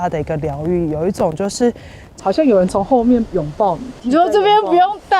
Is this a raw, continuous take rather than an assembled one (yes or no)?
no